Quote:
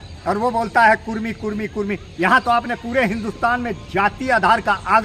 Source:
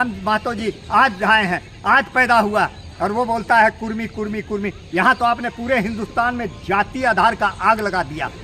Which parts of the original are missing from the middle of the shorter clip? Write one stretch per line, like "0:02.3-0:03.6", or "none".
none

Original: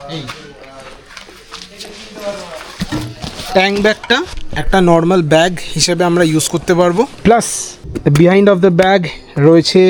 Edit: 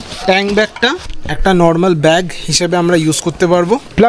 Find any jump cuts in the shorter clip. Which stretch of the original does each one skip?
none

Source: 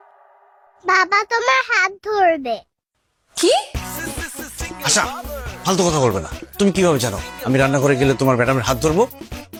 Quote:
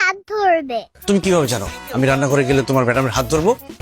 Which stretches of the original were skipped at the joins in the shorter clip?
0:02.7-0:06.4

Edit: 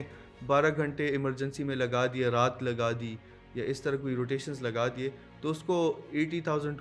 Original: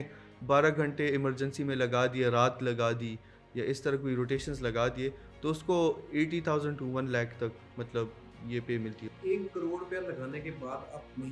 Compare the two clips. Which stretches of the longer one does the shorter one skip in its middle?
none

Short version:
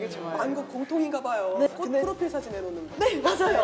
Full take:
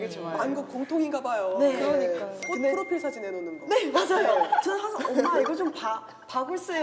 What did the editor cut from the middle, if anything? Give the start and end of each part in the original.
0:01.7-0:02.4

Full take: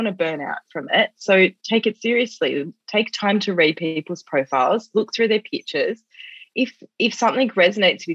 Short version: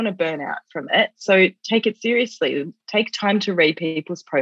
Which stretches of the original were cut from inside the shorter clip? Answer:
none

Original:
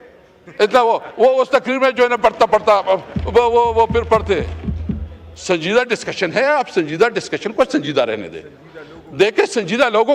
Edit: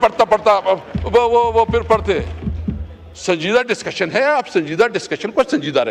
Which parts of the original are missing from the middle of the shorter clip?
none

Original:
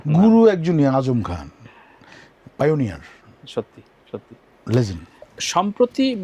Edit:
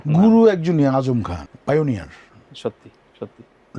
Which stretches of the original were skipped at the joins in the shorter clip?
0:01.5-0:02.4

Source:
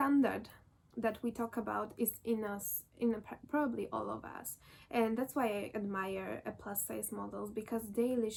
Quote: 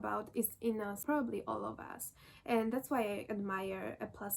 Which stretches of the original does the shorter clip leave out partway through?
0:02.6-0:03.4

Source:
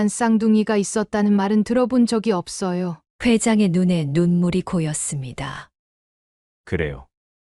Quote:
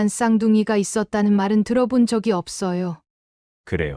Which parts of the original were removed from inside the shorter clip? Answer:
0:03.1-0:06.1

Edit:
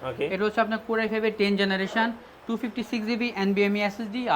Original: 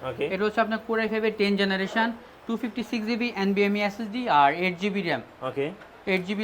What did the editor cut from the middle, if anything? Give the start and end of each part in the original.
none

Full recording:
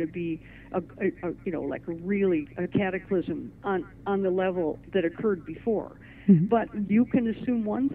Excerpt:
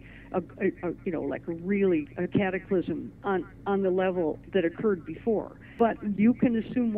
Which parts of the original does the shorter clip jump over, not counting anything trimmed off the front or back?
0:06.2-0:06.5

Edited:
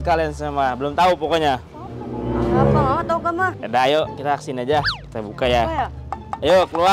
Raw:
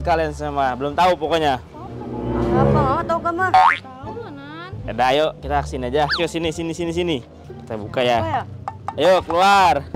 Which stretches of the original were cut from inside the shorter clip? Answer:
0:03.5-0:04.7
0:06.1-0:07.4

